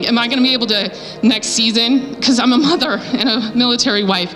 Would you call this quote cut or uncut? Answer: uncut